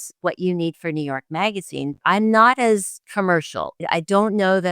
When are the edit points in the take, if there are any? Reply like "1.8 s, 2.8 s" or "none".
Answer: 2.0 s, 3.7 s